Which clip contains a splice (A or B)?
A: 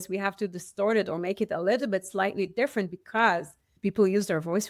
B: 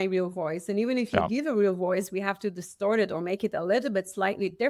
A